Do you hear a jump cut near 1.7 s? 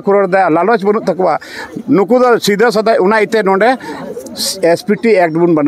no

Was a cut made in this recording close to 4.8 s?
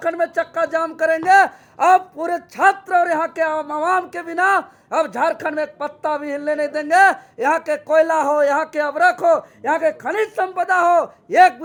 no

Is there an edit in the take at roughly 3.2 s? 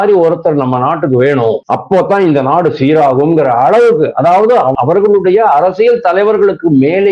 no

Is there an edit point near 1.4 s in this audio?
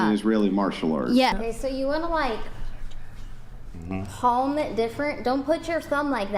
yes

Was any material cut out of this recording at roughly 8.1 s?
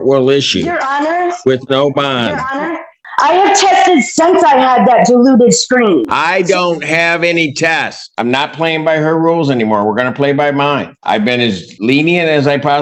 yes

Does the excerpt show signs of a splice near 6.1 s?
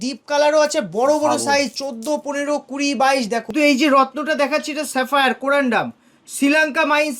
no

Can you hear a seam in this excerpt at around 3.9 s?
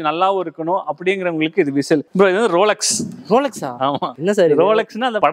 no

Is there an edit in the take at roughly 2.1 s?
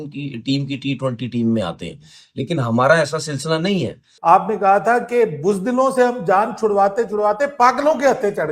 no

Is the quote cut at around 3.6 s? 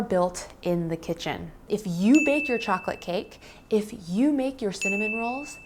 no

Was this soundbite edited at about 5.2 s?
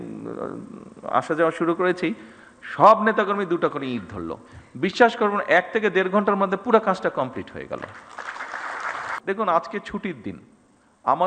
no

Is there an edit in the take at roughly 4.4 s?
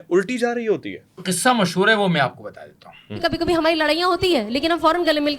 no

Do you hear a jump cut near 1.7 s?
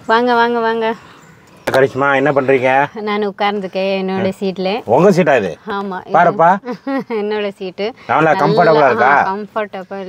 yes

